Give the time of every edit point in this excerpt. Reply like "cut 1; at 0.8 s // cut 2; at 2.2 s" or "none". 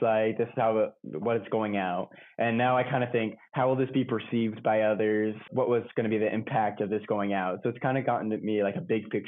cut 1; at 5.5 s